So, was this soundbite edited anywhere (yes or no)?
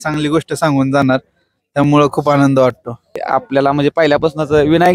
yes